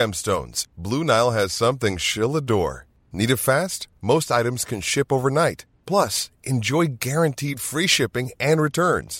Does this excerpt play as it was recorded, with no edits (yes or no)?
yes